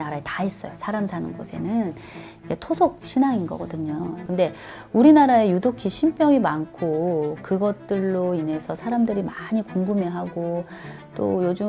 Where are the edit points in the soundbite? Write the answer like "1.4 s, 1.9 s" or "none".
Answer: 4.2 s